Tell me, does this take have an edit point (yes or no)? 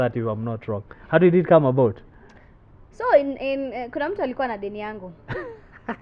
no